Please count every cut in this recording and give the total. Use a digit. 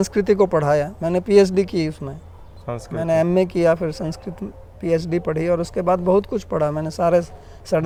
0